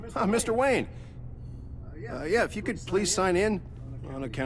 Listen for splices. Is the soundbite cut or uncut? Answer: uncut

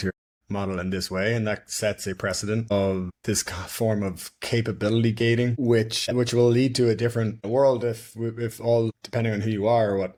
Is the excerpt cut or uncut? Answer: uncut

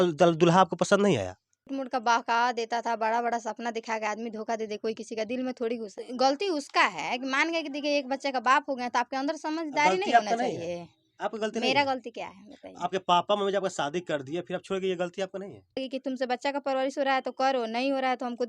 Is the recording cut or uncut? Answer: cut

